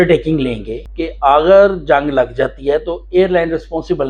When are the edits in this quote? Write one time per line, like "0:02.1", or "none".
none